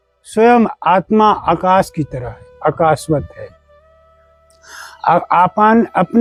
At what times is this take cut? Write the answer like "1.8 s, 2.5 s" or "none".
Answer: none